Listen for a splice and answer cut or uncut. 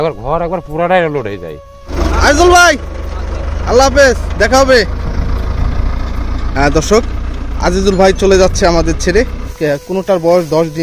cut